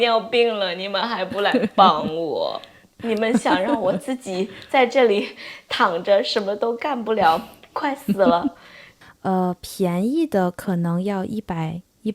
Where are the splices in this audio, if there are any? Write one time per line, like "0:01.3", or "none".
0:08.9